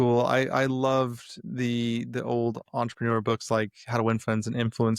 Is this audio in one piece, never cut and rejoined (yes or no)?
yes